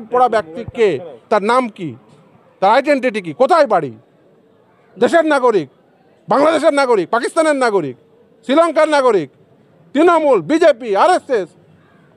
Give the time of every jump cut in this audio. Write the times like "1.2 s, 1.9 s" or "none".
none